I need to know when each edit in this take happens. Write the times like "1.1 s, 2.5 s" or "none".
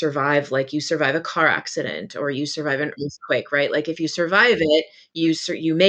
none